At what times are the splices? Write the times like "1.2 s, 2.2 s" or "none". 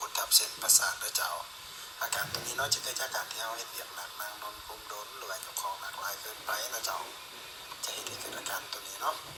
none